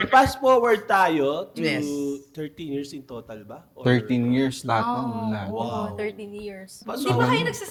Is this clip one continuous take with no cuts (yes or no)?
yes